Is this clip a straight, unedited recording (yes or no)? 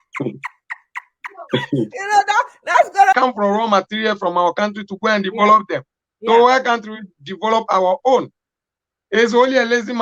no